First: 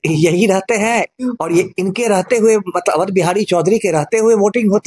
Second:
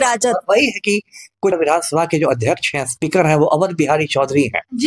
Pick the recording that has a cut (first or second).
second